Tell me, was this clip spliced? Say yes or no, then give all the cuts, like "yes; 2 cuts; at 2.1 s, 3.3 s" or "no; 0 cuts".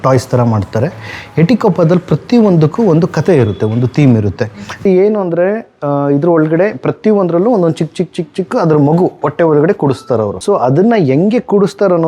yes; 2 cuts; at 4.9 s, 10.4 s